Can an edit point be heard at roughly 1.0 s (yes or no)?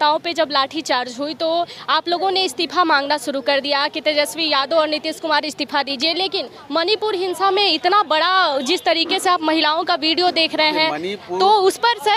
no